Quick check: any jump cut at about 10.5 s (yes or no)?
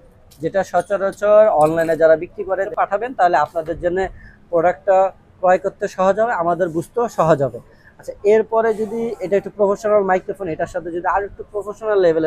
no